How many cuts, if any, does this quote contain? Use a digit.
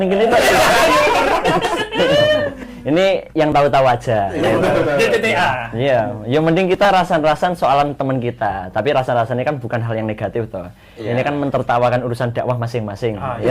1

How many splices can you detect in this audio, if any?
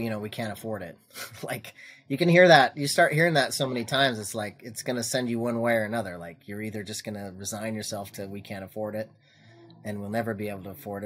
0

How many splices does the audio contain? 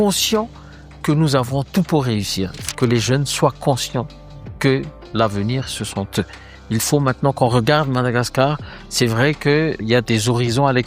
2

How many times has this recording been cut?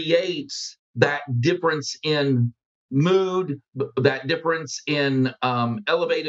1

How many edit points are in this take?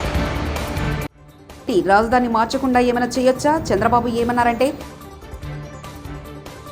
1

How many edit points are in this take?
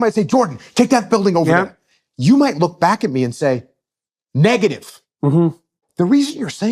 1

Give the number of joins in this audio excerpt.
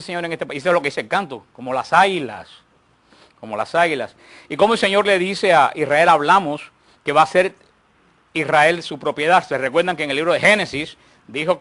1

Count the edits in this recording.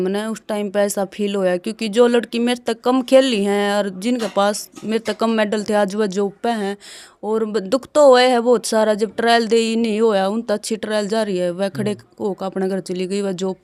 0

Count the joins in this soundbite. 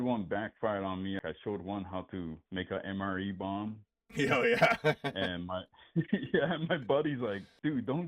1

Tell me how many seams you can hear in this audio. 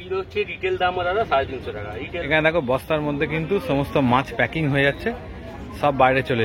1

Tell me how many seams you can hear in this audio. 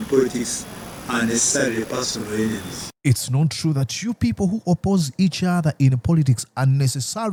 0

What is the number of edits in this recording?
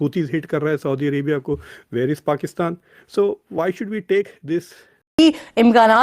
1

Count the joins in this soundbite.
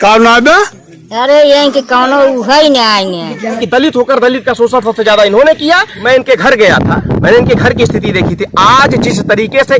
2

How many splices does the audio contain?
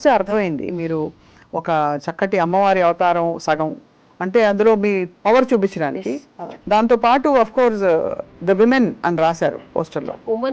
0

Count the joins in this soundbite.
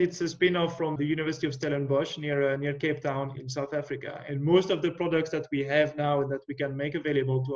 2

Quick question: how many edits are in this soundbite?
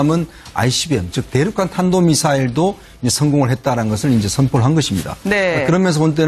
1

